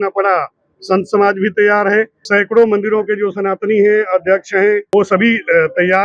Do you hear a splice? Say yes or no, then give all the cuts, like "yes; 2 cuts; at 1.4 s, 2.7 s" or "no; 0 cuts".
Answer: yes; 2 cuts; at 2.2 s, 4.8 s